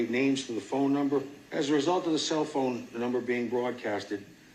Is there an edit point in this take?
yes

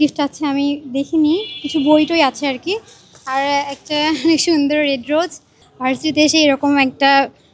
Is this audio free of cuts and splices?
no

